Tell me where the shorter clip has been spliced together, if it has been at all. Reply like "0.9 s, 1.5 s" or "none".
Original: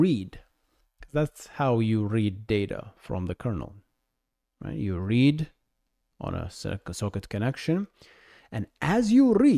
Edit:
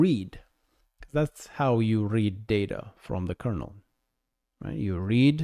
none